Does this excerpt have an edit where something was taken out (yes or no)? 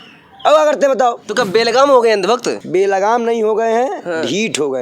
yes